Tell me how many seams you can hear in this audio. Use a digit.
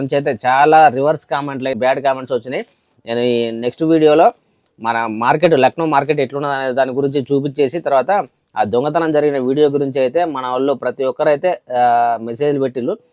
1